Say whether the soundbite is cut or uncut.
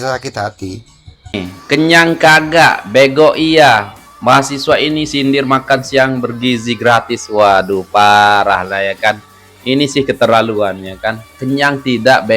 cut